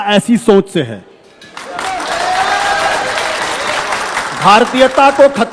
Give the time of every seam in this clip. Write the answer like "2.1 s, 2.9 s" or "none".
none